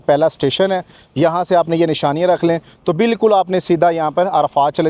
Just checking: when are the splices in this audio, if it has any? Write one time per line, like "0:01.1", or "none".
none

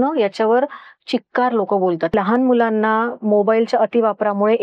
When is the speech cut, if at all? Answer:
0:02.1

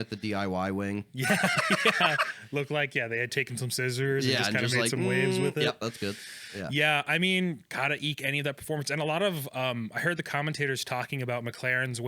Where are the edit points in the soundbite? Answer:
none

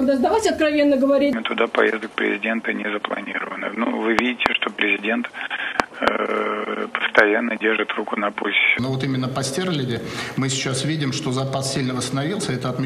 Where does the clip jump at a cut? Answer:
0:01.3
0:08.8

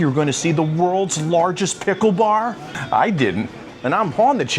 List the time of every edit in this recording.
0:02.7
0:03.6

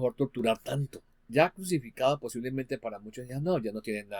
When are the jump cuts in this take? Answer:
0:01.2

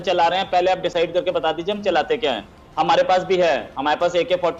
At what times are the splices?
none

